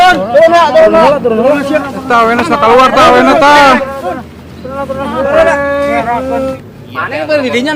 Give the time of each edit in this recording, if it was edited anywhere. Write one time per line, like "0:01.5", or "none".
0:06.5